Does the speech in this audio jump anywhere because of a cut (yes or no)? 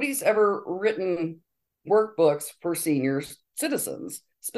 no